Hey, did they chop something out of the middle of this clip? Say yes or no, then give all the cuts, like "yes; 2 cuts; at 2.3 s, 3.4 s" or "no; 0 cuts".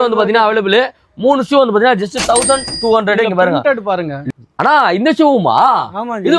yes; 1 cut; at 4.2 s